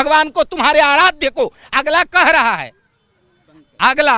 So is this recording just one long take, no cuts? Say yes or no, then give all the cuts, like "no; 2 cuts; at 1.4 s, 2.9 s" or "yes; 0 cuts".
yes; 0 cuts